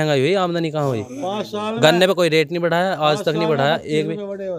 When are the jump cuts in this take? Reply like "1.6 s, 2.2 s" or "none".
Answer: none